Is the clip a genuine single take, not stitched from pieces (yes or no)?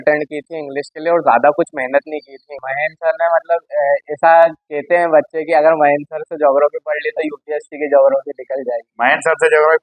no